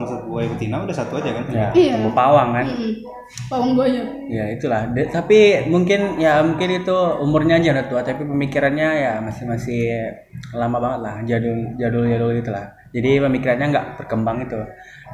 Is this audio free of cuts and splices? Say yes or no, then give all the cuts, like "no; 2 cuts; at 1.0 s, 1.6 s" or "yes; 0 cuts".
yes; 0 cuts